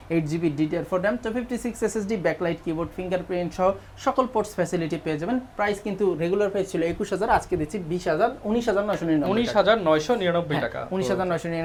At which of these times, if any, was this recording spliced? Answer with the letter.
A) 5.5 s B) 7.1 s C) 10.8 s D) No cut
D